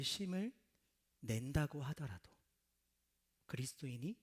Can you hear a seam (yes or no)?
no